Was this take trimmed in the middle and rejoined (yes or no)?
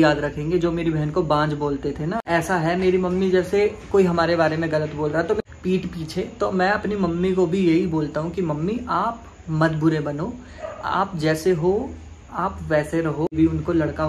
yes